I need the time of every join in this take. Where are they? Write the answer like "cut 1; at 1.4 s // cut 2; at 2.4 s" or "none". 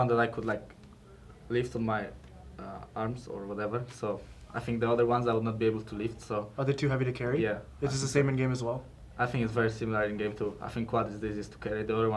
none